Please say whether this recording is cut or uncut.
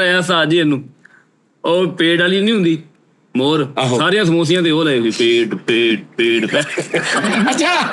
uncut